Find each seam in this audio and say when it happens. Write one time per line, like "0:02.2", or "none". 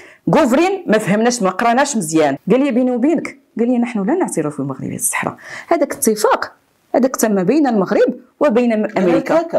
0:02.4